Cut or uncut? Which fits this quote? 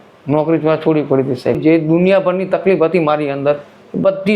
cut